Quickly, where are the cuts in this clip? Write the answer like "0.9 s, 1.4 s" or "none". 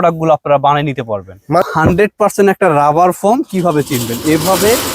1.7 s